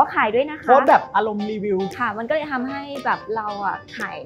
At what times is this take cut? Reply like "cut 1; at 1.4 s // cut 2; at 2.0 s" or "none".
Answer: cut 1; at 1.9 s